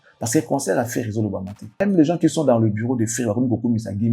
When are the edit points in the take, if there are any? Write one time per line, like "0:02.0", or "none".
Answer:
0:01.8